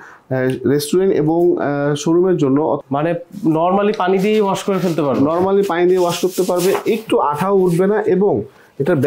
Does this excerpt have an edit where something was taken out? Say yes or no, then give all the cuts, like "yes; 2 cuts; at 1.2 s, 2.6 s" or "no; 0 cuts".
yes; 1 cut; at 2.8 s